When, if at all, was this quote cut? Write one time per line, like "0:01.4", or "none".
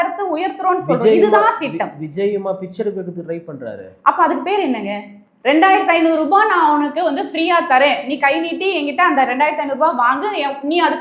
none